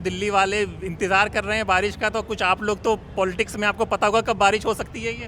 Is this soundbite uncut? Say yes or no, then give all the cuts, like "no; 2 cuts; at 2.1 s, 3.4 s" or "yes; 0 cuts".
yes; 0 cuts